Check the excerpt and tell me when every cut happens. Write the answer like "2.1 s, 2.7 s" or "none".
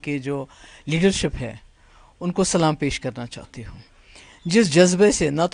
none